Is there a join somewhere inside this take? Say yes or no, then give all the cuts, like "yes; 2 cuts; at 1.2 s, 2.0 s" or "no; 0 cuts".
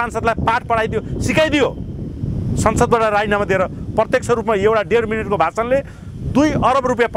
no; 0 cuts